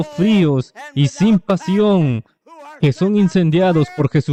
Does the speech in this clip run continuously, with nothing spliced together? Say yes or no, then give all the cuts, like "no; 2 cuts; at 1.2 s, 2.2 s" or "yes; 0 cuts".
yes; 0 cuts